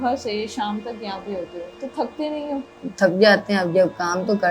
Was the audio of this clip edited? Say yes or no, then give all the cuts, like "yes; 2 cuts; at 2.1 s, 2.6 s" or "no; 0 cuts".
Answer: yes; 2 cuts; at 1.7 s, 2.8 s